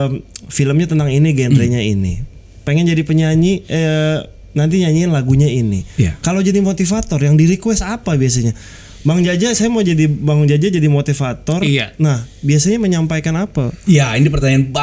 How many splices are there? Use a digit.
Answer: 0